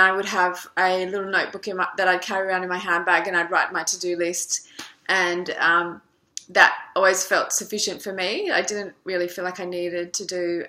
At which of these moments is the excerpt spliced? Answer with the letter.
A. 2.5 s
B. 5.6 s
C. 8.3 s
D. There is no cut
B